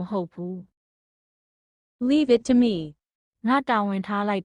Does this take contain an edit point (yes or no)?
yes